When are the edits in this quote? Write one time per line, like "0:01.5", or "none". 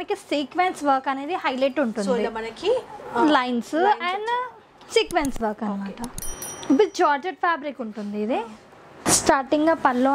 none